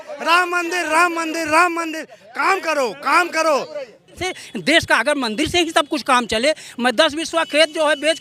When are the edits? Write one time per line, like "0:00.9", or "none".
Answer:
0:04.2